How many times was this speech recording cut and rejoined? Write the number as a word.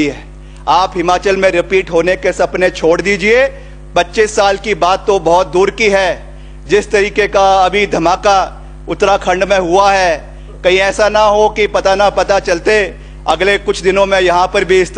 zero